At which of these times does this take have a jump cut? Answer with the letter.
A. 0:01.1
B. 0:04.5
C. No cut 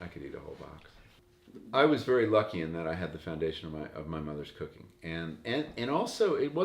A